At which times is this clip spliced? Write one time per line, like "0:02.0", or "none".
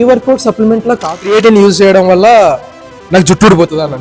0:01.2